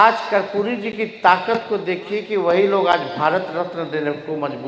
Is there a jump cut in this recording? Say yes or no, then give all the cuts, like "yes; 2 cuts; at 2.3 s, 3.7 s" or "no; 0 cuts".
no; 0 cuts